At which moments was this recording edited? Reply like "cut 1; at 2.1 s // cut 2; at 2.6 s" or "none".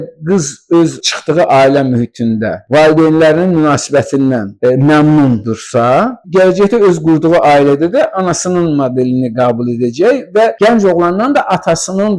none